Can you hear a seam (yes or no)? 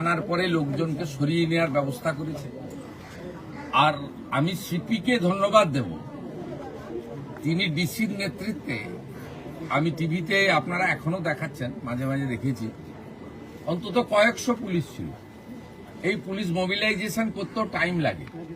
no